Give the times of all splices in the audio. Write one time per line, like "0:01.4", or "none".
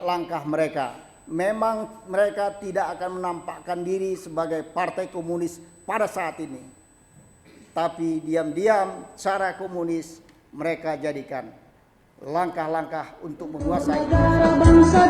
0:13.8